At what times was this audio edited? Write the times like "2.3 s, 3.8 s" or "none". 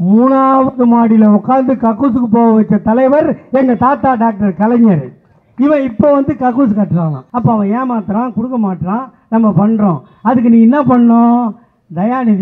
7.2 s